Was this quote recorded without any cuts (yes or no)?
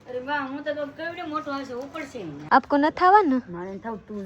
no